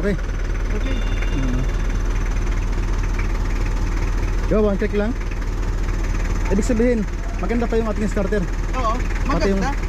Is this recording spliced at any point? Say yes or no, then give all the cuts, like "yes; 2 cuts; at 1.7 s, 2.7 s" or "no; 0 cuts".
no; 0 cuts